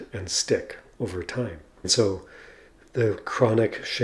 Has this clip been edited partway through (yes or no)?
yes